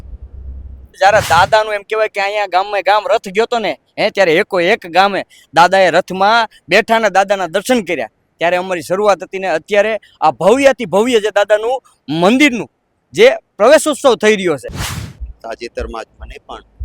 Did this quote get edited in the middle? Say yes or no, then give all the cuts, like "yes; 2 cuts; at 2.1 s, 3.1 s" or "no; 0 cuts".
yes; 2 cuts; at 1.0 s, 14.8 s